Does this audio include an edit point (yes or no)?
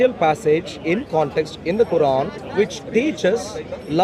yes